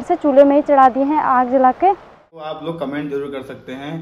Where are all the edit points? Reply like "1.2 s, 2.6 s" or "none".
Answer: 2.2 s